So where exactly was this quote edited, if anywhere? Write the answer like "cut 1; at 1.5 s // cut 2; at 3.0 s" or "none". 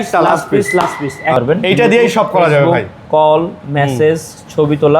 cut 1; at 1.4 s